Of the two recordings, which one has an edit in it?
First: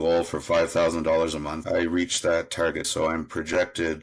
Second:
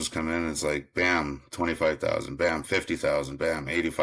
first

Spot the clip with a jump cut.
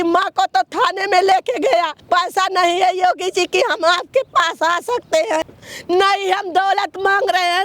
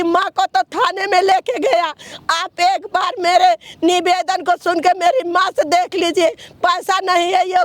first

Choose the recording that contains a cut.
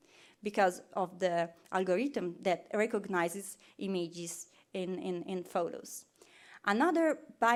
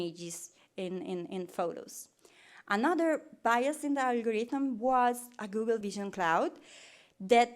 second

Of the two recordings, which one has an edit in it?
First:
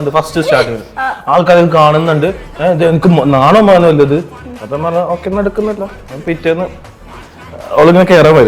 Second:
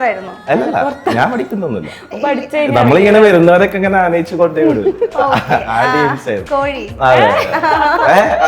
second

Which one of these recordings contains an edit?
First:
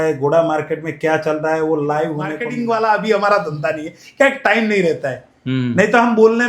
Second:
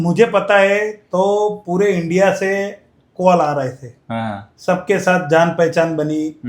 first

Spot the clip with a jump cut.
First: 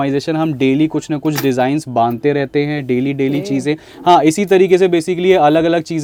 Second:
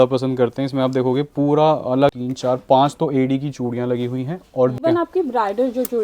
second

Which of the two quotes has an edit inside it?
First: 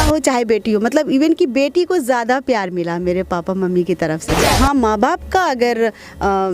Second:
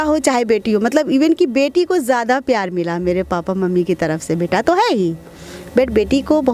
first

